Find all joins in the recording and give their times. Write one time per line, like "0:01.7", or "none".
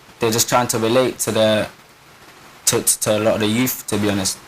0:03.4